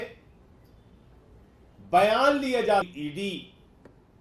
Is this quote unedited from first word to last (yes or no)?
no